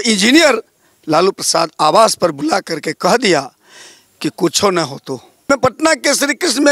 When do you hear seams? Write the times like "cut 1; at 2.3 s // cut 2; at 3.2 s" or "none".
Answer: cut 1; at 5.5 s